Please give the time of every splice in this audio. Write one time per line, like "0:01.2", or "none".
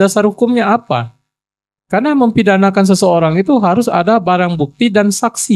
none